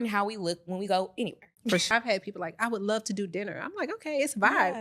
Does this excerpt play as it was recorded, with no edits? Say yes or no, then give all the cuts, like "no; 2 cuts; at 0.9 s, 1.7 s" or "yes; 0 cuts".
no; 1 cut; at 1.9 s